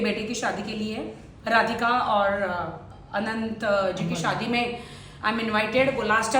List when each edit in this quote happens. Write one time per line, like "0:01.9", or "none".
none